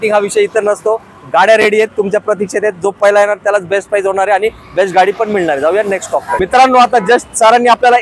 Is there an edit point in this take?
no; 0 cuts

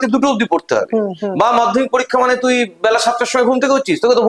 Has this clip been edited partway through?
no; 0 cuts

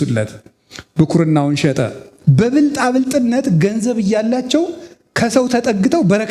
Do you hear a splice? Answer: yes; 1 cut; at 2.0 s

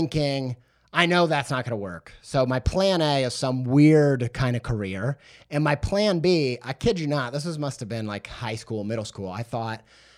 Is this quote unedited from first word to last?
yes; 0 cuts

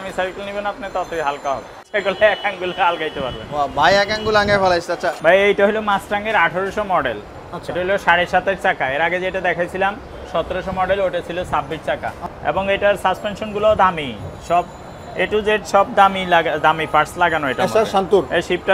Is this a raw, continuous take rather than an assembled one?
no; 3 cuts; at 1.9 s, 5.2 s, 12.3 s

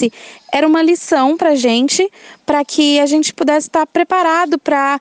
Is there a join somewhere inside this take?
yes; 1 cut; at 3.4 s

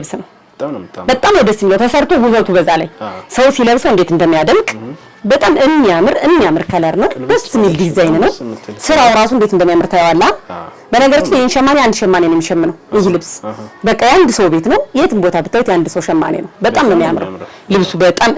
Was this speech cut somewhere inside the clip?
no; 0 cuts

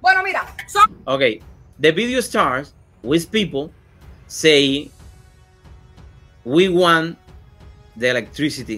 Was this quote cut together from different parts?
no; 0 cuts

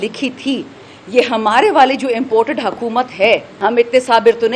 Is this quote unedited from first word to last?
no; 1 cut; at 3.5 s

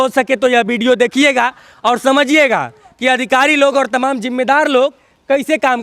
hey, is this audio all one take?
yes; 0 cuts

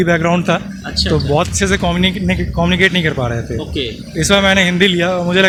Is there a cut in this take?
no; 0 cuts

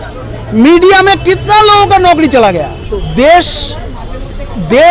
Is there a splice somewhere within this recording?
yes; 1 cut; at 2.9 s

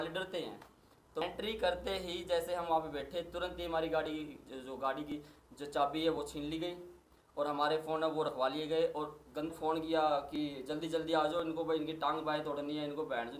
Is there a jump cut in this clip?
yes; 2 cuts; at 1.2 s, 9.5 s

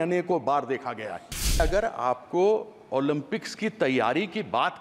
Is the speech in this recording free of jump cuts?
no; 1 cut; at 1.6 s

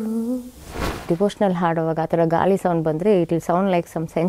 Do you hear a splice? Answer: yes; 1 cut; at 1.0 s

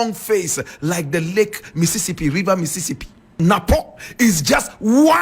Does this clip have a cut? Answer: yes; 1 cut; at 3.3 s

